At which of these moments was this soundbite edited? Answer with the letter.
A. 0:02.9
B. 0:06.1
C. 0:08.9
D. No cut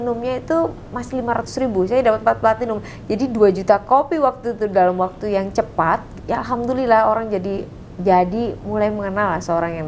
B